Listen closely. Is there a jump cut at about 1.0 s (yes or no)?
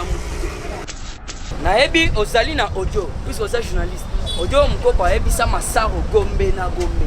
yes